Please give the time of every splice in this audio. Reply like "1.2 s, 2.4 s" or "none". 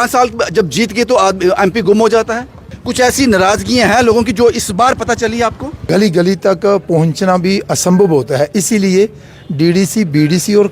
2.8 s, 5.8 s